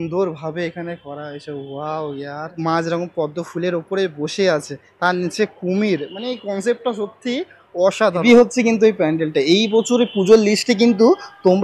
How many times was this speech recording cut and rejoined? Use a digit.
2